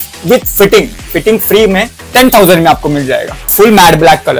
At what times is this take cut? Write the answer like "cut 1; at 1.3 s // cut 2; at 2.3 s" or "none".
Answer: cut 1; at 3.3 s

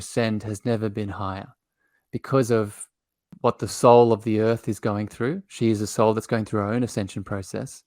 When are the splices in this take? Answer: cut 1; at 3.3 s

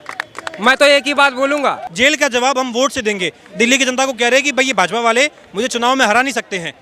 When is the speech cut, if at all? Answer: cut 1; at 1.9 s

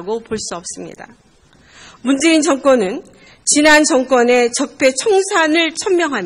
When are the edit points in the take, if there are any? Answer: cut 1; at 1.1 s

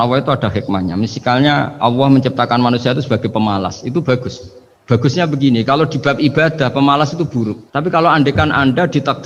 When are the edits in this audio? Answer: none

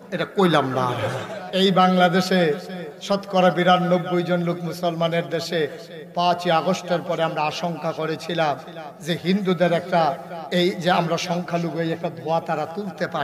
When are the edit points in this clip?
cut 1; at 1.3 s

